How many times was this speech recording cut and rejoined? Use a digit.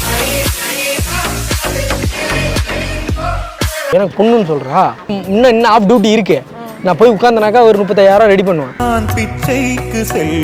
1